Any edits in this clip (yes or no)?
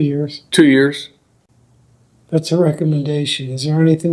no